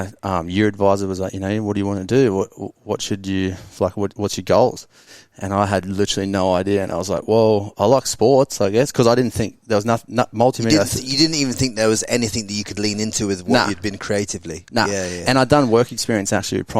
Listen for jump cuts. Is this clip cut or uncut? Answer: uncut